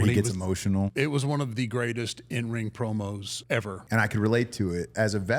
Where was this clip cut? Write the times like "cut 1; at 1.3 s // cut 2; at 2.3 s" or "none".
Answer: cut 1; at 0.9 s // cut 2; at 3.7 s